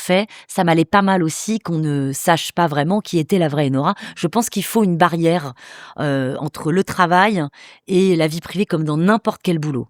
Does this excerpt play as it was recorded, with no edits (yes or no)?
yes